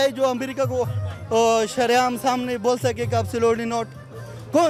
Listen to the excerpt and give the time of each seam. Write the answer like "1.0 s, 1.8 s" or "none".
none